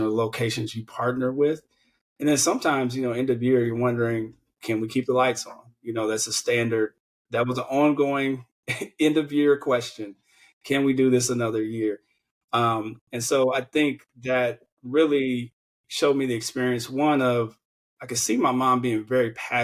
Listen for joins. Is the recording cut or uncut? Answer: cut